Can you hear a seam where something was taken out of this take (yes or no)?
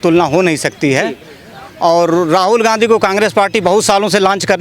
no